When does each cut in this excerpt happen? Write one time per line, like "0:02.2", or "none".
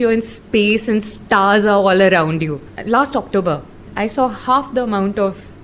0:02.7
0:03.9